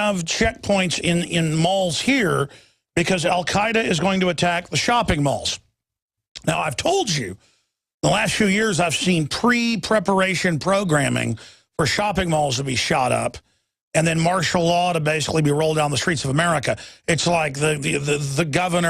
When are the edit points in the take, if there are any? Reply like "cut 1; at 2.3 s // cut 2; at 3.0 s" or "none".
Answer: cut 1; at 8.6 s